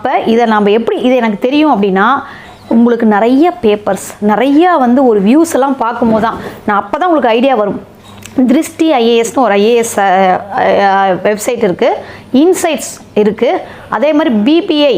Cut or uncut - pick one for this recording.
uncut